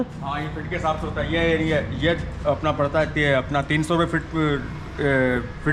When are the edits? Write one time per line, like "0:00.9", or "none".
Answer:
none